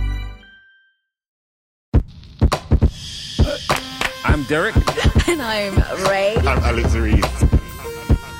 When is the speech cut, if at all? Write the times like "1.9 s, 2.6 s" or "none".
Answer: 1.4 s